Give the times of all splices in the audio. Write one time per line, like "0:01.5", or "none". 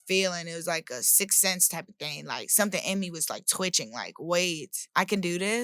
0:04.7